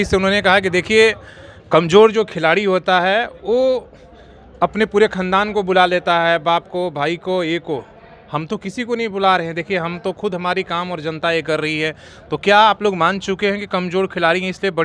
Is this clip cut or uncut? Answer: uncut